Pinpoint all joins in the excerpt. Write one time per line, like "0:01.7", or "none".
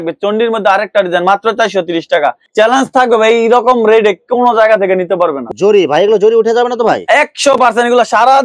0:02.4
0:05.4